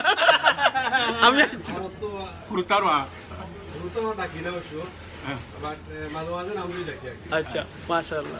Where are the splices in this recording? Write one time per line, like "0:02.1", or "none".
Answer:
0:01.6